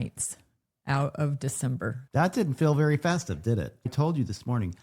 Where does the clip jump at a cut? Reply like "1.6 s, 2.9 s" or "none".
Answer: 2.0 s, 3.8 s

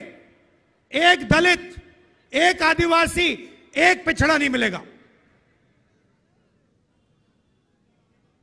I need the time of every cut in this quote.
none

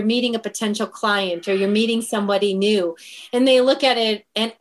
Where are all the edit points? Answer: none

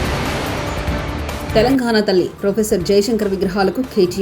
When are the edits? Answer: 1.5 s

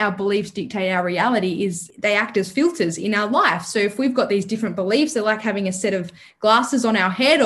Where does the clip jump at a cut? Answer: 1.9 s

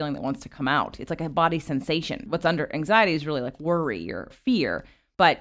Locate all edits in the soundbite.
2.3 s, 4.3 s

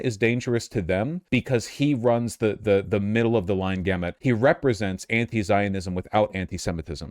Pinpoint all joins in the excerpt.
1.2 s, 4.1 s

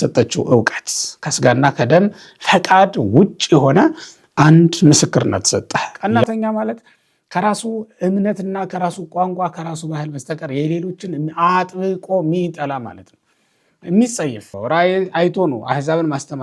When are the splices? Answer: 5.9 s, 14.5 s

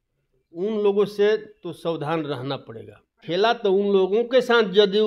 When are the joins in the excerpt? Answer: 3.1 s

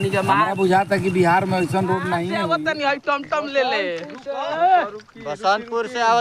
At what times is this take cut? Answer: 2.4 s

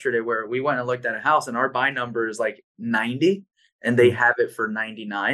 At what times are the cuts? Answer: none

